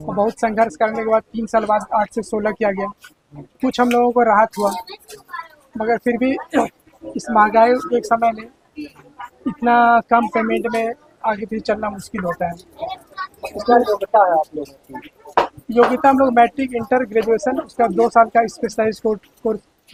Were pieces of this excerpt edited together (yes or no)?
no